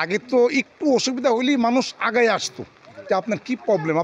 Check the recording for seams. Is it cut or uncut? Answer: uncut